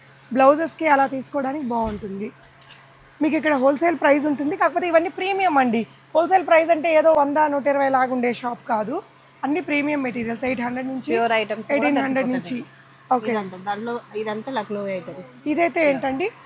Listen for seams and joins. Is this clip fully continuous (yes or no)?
yes